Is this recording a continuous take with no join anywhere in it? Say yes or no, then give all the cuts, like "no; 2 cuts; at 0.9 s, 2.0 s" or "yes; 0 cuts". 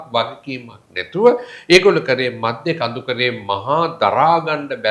yes; 0 cuts